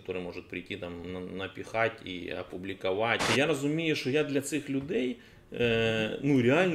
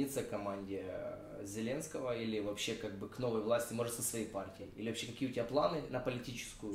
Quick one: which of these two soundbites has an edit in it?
first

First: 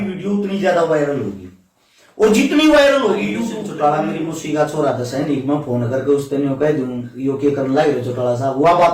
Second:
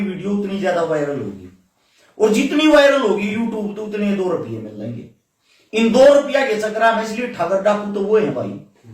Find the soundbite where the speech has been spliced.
first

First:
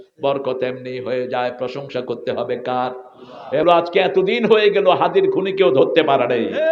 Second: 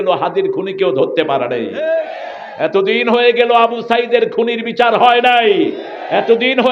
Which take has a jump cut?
first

